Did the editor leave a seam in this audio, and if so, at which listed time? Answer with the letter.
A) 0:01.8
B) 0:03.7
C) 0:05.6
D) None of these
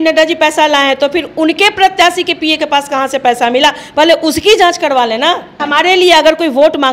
C